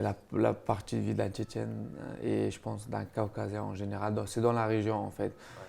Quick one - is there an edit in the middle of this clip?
no; 0 cuts

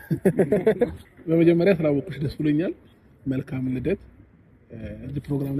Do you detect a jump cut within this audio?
yes; 1 cut; at 1.0 s

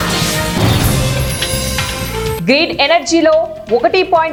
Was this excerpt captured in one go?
yes; 0 cuts

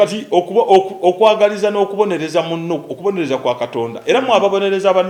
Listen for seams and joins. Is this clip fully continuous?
yes; 0 cuts

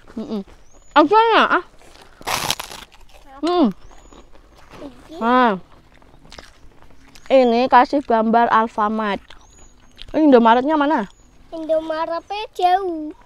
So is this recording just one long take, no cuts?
yes; 0 cuts

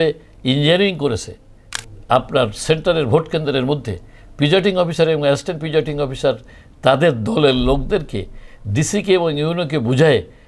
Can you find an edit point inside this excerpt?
no; 0 cuts

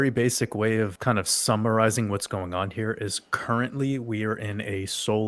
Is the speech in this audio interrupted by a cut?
yes; 1 cut; at 0.9 s

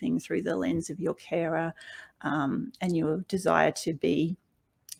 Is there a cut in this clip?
no; 0 cuts

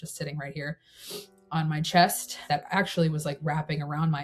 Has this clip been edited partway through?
yes; 1 cut; at 2.3 s

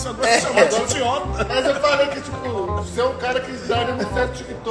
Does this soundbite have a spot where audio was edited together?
no; 0 cuts

